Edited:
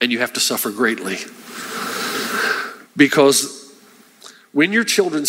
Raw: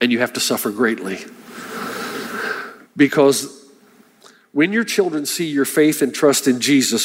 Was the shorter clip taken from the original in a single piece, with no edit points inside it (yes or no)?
yes